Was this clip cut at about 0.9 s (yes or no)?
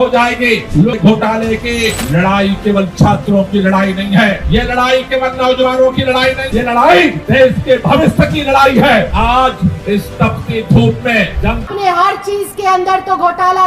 yes